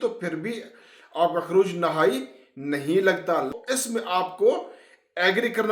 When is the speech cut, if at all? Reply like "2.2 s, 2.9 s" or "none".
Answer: 3.5 s